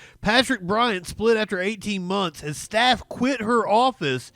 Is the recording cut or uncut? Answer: uncut